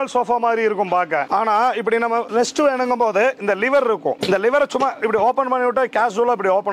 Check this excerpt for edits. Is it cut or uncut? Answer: uncut